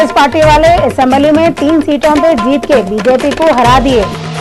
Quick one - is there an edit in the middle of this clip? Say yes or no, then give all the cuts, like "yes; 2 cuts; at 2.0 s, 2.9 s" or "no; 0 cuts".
no; 0 cuts